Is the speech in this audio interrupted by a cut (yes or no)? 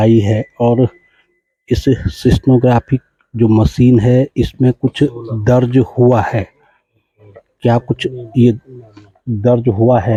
no